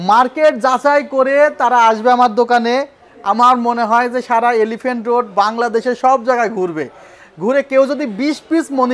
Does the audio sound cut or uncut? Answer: uncut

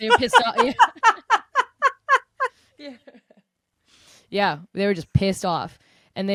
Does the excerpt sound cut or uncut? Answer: uncut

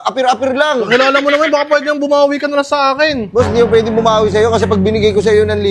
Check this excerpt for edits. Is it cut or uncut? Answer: uncut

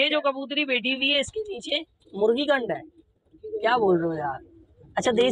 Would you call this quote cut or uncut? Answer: uncut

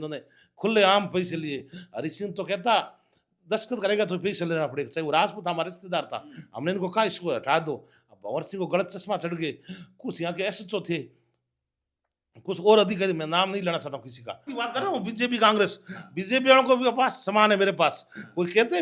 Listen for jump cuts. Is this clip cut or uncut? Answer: cut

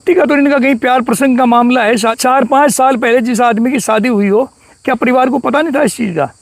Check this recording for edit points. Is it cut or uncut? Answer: cut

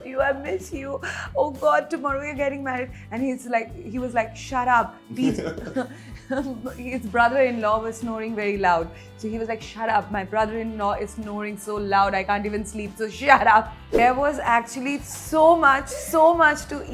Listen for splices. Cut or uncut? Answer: cut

